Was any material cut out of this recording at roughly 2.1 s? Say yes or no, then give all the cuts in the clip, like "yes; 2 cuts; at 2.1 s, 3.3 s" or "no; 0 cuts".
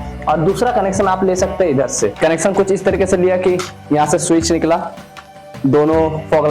yes; 1 cut; at 2.1 s